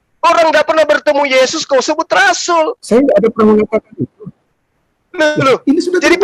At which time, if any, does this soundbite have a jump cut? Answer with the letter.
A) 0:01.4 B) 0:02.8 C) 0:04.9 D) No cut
D